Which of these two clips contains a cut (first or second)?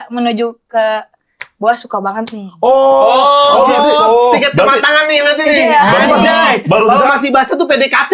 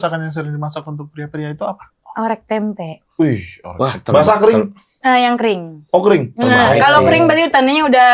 second